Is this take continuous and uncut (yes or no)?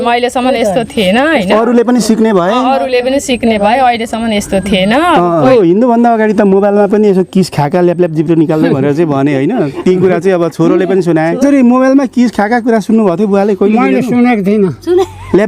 no